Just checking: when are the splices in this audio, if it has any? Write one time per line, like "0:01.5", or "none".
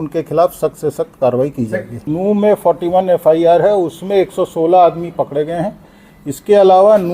0:02.0